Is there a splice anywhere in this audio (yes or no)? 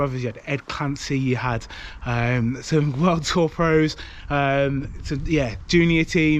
no